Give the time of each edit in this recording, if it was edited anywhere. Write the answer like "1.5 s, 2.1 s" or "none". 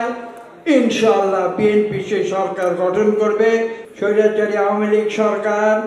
3.8 s